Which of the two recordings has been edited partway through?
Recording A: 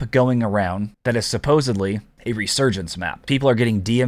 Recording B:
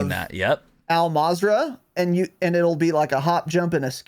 A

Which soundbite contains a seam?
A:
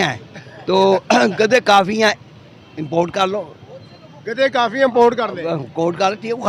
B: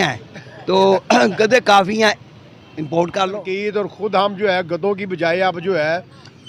B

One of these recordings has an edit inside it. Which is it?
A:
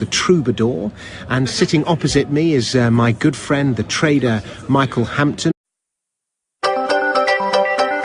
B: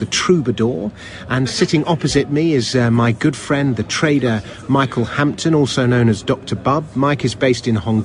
B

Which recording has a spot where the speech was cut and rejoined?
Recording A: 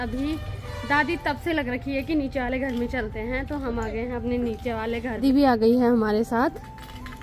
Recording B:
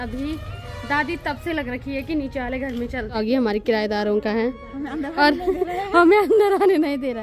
B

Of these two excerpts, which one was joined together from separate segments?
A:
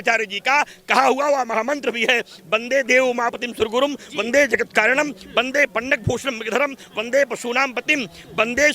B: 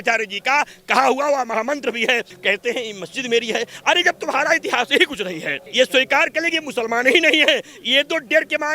B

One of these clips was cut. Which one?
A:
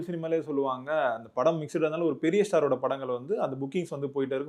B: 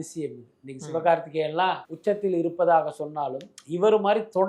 B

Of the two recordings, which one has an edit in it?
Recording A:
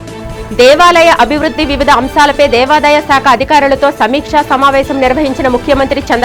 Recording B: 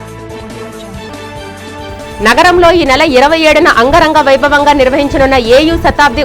B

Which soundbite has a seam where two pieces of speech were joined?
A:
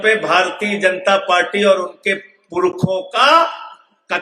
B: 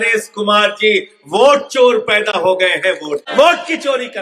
B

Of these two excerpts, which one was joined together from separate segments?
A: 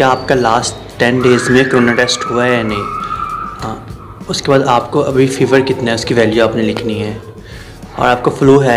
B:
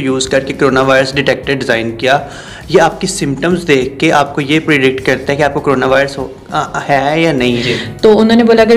B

